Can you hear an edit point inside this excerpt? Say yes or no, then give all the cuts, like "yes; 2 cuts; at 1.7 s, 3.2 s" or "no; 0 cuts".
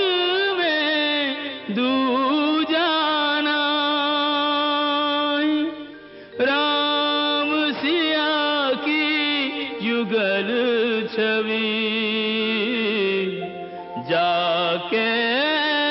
no; 0 cuts